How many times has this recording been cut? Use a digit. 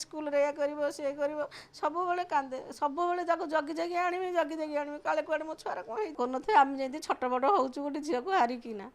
1